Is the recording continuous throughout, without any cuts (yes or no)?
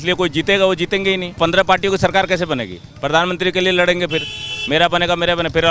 no